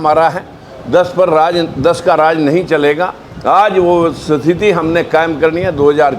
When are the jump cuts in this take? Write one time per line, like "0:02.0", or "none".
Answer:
none